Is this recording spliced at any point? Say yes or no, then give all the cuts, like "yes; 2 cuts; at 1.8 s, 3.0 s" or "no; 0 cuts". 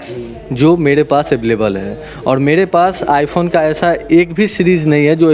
no; 0 cuts